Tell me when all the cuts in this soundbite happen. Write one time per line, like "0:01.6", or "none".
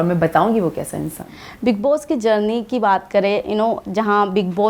none